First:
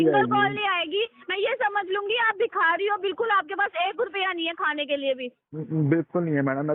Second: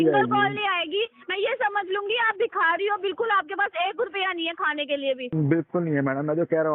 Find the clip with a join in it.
second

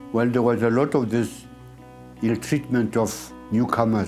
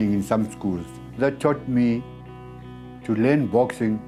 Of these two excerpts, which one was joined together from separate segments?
second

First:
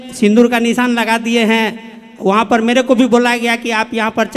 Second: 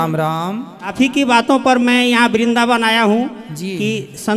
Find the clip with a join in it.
second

